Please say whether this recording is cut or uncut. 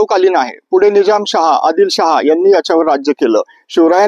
uncut